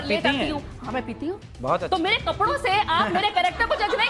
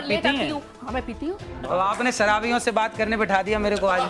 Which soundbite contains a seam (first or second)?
second